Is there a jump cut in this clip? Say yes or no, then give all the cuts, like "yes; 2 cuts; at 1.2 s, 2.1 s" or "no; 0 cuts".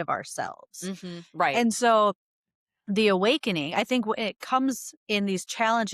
no; 0 cuts